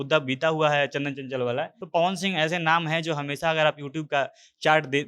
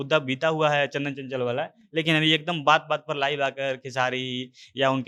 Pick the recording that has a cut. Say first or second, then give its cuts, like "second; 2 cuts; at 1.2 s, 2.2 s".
first; 1 cut; at 1.7 s